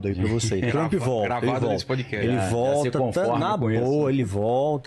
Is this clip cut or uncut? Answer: uncut